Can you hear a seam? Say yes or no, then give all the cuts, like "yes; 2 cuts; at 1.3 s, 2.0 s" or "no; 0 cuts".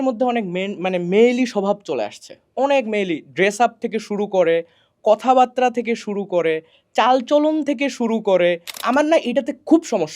yes; 1 cut; at 8.8 s